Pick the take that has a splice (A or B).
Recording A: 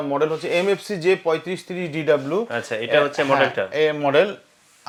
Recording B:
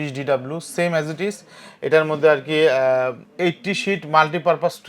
B